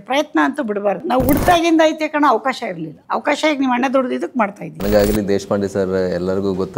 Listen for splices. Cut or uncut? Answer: cut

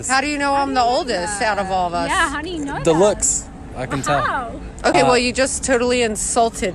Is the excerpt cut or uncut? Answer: uncut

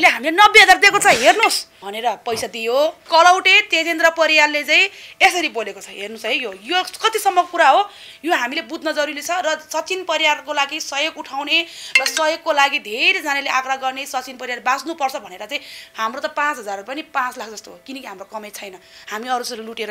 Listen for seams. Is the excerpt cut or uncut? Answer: uncut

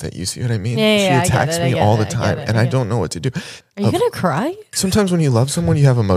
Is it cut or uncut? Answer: cut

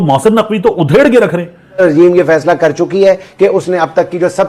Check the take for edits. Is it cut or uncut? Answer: cut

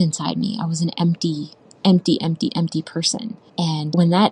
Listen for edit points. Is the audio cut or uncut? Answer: cut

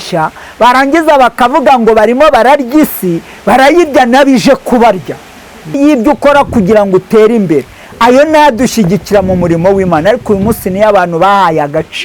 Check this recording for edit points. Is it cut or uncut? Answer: cut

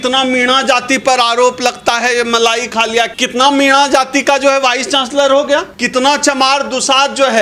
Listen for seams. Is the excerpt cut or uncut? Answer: cut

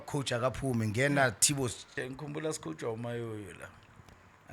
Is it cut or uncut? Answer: cut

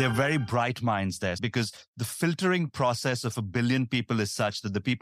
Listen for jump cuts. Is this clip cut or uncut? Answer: cut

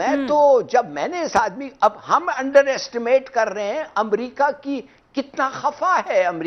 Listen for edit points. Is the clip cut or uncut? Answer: uncut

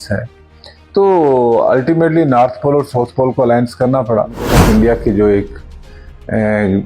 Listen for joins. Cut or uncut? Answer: cut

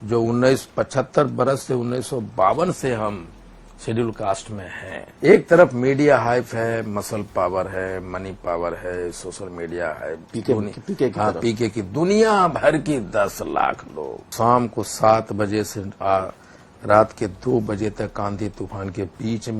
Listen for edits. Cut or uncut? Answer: cut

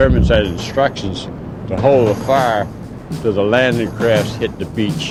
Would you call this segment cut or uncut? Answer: uncut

